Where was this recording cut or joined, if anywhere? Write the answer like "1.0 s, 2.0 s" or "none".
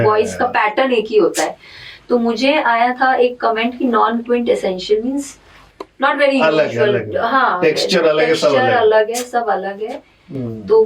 none